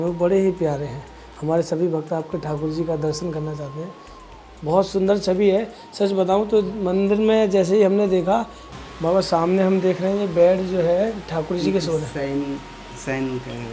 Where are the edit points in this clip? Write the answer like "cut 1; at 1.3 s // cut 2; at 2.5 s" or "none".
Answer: cut 1; at 8.6 s